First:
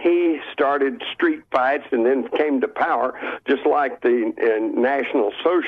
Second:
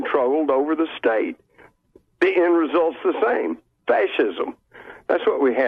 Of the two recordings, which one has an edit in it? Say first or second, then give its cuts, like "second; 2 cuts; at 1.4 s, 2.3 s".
first; 1 cut; at 2.0 s